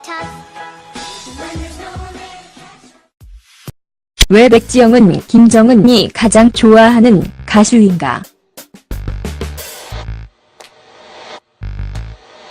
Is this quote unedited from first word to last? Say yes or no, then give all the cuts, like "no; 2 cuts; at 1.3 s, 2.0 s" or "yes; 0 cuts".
yes; 0 cuts